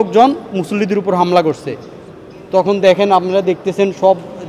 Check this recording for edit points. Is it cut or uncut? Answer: uncut